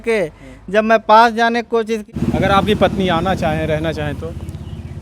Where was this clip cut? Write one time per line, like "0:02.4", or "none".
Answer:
0:02.1